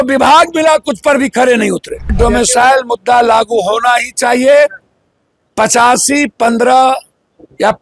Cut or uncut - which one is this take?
cut